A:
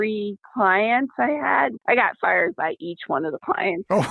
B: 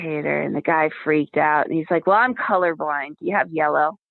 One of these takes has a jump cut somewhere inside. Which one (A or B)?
A